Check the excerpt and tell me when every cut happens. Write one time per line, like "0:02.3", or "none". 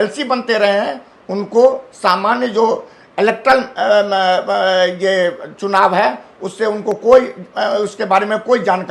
none